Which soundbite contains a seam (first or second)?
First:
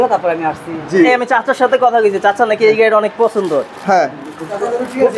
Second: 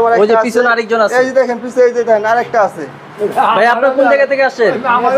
first